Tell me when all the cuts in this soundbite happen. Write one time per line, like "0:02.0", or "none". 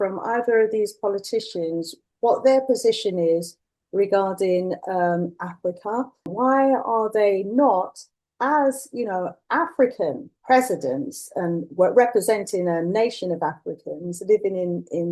0:02.0
0:06.3
0:10.3